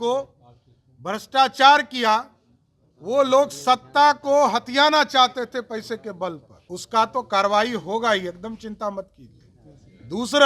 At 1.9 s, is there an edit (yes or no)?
no